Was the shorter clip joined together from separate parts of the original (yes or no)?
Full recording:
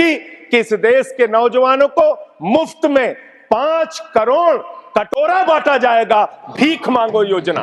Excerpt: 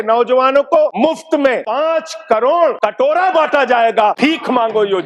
yes